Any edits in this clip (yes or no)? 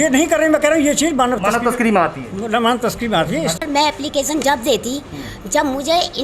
yes